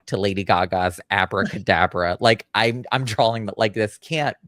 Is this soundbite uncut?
yes; 0 cuts

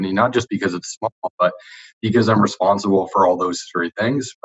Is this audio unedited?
yes; 0 cuts

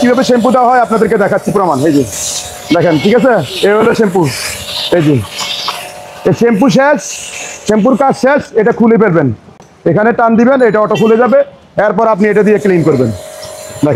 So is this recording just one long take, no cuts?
yes; 0 cuts

